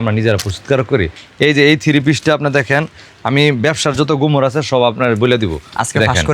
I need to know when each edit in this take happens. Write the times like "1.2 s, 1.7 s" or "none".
1.2 s